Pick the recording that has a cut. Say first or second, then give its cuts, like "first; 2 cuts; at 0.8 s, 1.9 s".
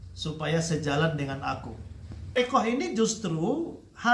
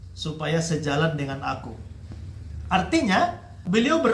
first; 1 cut; at 2.4 s